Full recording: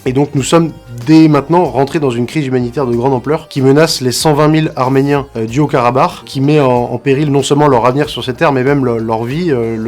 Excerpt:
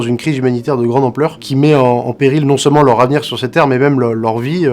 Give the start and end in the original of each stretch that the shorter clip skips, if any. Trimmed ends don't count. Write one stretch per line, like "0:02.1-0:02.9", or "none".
0:03.5-0:06.2